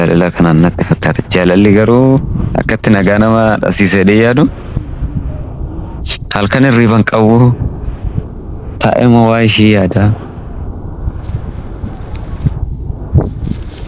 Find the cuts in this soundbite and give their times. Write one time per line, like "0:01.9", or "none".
none